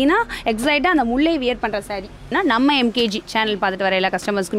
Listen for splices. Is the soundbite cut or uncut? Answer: cut